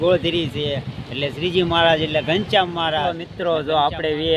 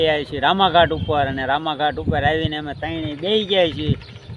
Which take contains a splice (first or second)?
first